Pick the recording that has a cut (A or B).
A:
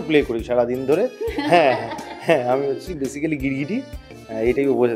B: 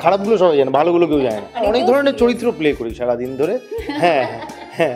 B